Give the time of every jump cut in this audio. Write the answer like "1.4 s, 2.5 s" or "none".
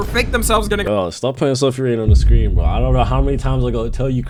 none